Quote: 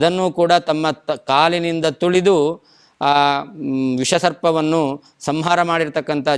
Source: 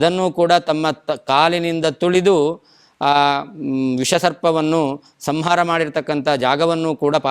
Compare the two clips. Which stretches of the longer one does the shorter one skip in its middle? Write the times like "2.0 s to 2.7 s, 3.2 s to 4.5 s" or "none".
none

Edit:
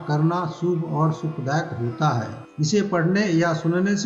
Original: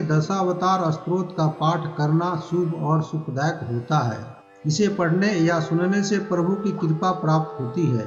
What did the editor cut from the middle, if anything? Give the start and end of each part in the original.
4.3 s to 4.5 s

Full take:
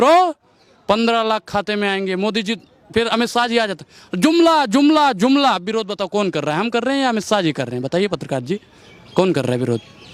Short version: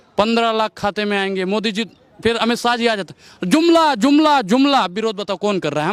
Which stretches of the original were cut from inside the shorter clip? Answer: none

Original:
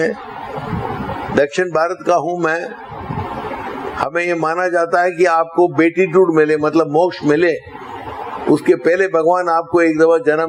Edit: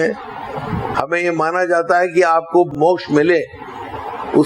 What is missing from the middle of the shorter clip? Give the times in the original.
0.9 s to 3.9 s, 5.8 s to 6.9 s

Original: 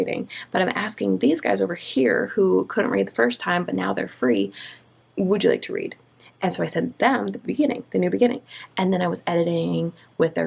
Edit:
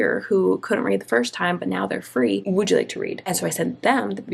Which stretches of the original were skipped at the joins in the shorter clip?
4.5 s to 5.2 s, 6.0 s to 6.4 s

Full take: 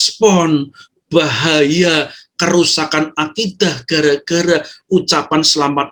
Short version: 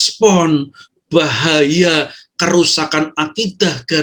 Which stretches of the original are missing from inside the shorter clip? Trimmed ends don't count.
none

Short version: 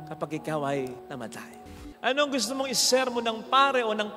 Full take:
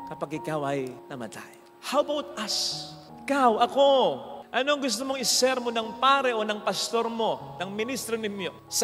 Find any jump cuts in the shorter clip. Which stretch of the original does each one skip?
1.8 s to 4.3 s

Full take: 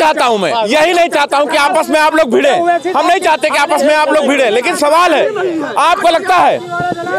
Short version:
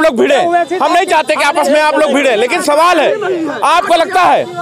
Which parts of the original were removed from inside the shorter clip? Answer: none

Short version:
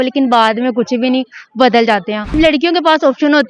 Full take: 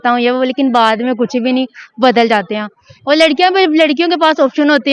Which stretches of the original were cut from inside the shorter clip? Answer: 2.8 s to 3.7 s

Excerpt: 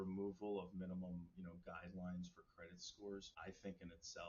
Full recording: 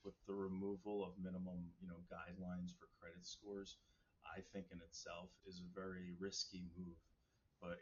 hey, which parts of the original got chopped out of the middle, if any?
3.8 s to 4.2 s

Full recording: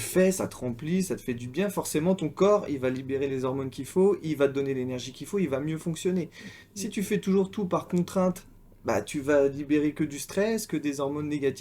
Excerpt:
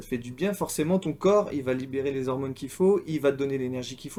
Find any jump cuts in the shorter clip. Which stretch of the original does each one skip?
none

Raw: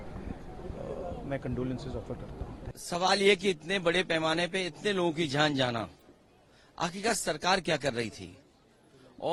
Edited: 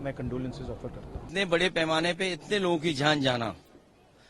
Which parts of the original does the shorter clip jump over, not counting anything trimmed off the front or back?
2.5 s to 3.6 s

